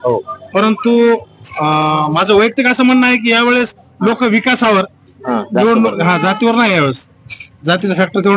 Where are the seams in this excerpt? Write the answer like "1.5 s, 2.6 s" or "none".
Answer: none